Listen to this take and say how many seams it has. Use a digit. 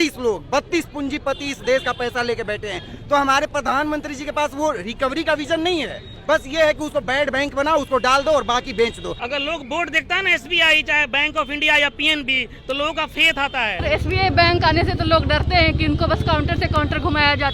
2